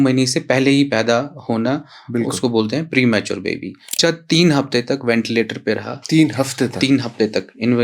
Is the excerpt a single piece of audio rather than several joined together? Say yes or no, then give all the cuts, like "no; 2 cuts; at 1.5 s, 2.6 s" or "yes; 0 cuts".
no; 1 cut; at 4.0 s